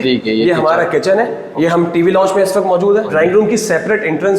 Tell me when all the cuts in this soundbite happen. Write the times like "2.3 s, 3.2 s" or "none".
1.4 s, 3.1 s